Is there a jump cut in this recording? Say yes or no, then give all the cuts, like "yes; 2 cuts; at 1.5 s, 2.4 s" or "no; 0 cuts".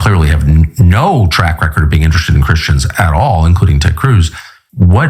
no; 0 cuts